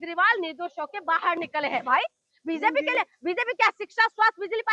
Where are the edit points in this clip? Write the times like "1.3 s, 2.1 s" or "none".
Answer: 1.9 s